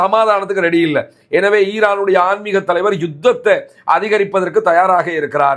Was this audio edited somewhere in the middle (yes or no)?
no